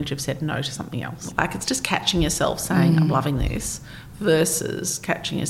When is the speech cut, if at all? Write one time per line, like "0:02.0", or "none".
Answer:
0:01.2